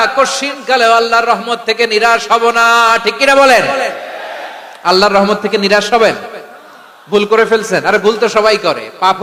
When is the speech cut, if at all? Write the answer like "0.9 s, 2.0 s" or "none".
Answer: none

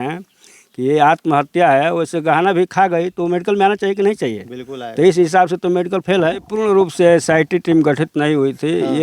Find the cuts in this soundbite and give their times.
6.5 s

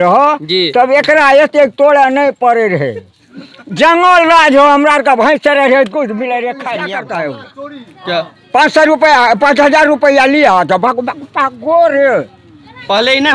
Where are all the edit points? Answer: 7.0 s

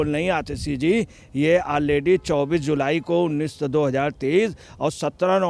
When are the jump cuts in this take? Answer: none

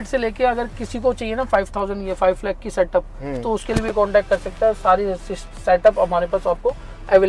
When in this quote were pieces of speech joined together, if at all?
none

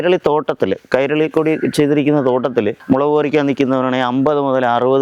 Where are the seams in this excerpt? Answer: none

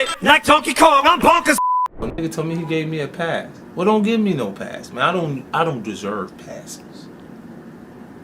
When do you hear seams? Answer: 2.0 s

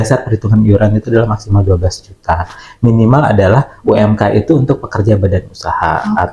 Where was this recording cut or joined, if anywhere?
none

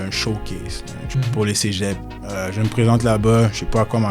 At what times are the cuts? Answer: 1.0 s, 2.1 s

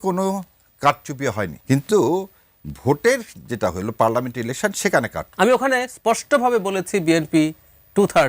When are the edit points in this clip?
1.6 s, 5.2 s

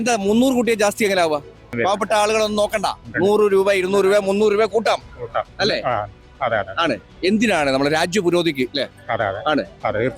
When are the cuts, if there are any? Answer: 1.7 s

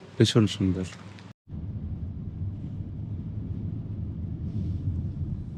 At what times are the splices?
none

